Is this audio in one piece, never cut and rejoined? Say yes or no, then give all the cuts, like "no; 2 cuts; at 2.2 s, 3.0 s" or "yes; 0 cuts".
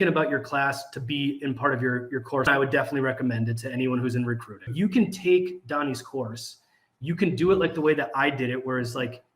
no; 2 cuts; at 2.5 s, 4.7 s